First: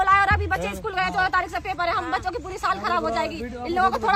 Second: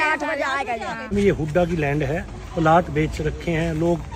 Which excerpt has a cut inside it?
second; 1 cut; at 1.1 s

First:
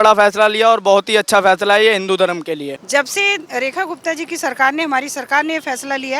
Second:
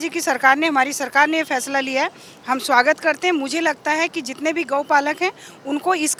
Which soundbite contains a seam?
first; 1 cut; at 2.8 s

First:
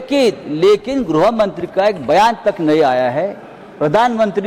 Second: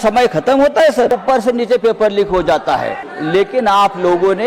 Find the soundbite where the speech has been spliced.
second; 2 cuts; at 1.1 s, 3.1 s

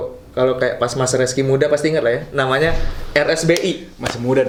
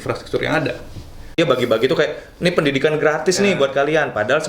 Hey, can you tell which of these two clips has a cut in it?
second; 1 cut; at 1.4 s

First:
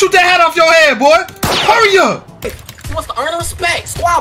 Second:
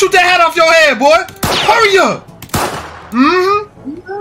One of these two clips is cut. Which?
first; 1 cut; at 2.5 s

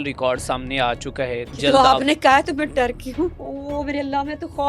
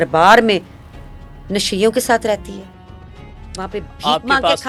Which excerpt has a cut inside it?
first; 2 cuts; at 1.6 s, 3.5 s

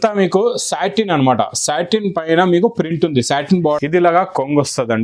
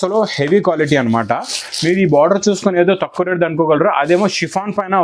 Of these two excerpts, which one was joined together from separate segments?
first; 1 cut; at 3.6 s

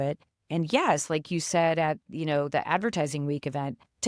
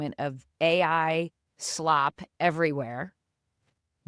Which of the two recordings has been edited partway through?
first; 1 cut; at 2.0 s

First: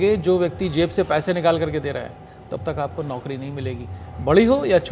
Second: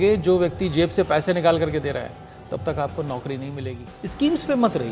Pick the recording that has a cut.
second; 1 cut; at 3.9 s

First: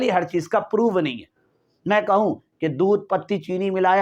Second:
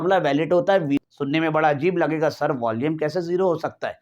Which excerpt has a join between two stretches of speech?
second; 1 cut; at 1.0 s

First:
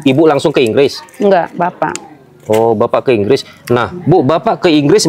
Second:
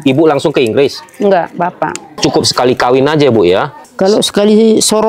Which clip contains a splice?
second; 2 cuts; at 2.2 s, 3.8 s

